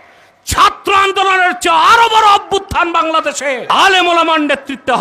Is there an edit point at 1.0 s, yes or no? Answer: no